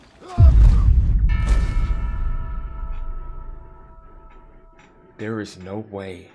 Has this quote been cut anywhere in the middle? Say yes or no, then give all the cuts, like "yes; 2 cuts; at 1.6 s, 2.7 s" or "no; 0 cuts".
no; 0 cuts